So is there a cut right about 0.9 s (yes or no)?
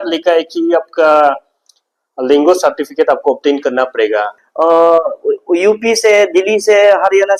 no